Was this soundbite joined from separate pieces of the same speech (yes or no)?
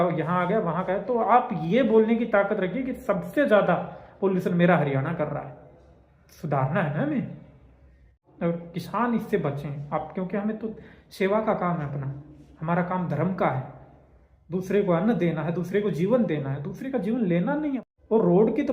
yes